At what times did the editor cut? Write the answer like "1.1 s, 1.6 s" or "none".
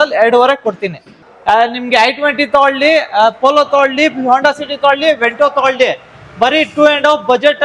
1.1 s